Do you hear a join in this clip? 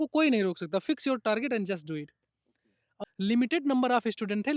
yes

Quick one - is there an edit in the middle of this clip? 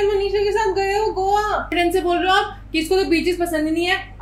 yes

